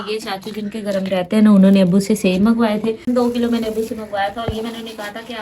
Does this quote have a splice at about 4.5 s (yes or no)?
no